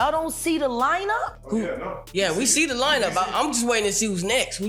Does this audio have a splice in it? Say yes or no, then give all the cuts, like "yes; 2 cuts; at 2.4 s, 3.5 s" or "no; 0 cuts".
yes; 1 cut; at 1.4 s